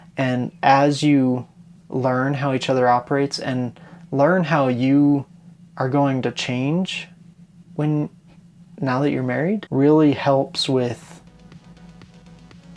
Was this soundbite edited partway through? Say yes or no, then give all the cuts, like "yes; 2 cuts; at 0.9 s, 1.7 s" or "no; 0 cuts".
yes; 1 cut; at 9.6 s